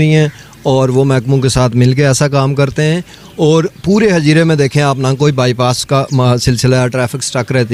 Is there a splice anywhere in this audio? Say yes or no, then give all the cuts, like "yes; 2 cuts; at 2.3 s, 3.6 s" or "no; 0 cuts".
no; 0 cuts